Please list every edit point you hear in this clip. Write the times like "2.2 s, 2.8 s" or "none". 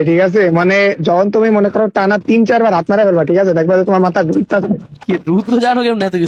none